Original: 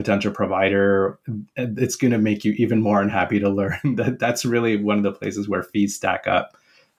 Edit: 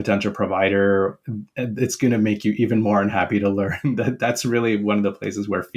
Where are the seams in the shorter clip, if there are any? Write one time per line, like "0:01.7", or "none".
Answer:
none

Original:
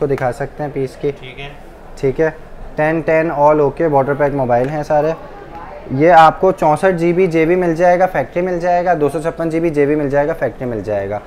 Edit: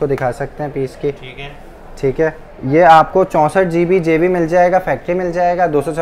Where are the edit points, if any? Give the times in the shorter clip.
0:02.5

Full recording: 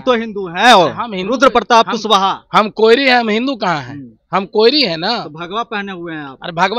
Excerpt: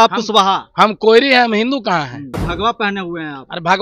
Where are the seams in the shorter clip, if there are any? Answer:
0:02.4

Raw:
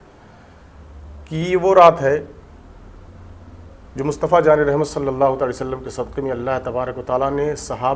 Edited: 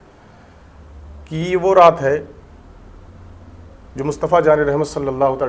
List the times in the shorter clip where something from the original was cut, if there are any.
none

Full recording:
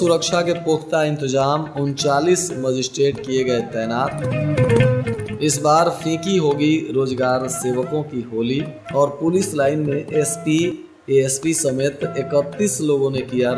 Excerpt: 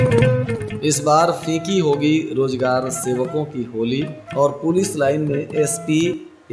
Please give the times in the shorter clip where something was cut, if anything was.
none

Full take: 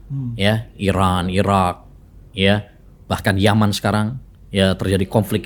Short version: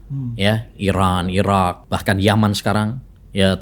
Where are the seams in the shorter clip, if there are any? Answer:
0:01.9

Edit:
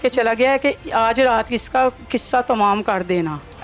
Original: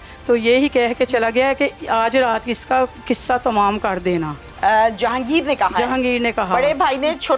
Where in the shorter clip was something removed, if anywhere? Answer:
none

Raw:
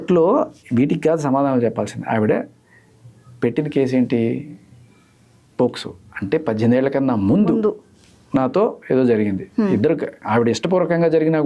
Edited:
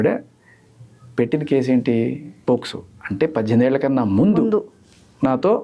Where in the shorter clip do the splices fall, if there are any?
0:02.3

